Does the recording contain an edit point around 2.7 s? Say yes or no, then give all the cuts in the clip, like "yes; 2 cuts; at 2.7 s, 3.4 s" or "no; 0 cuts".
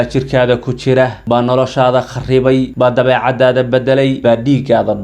yes; 3 cuts; at 1.2 s, 2.7 s, 4.2 s